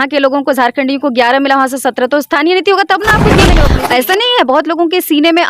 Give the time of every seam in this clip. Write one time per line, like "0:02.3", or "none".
0:03.5